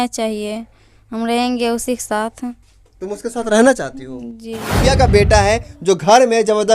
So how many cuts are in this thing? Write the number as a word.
one